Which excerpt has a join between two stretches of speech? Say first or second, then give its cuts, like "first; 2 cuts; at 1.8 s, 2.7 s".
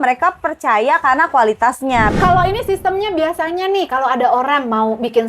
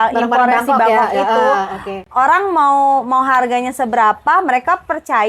first; 1 cut; at 2.1 s